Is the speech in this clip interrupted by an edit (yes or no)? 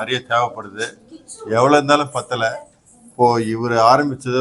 no